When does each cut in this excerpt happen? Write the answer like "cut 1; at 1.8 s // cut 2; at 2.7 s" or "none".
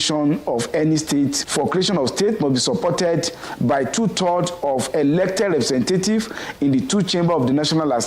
cut 1; at 1.4 s